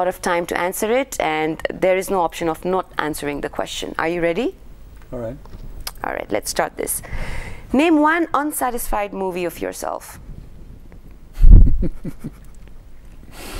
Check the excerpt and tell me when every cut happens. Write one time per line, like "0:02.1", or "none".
none